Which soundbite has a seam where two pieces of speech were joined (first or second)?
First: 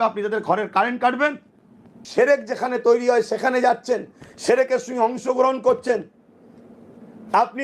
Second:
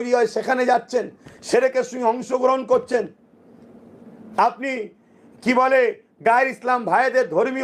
first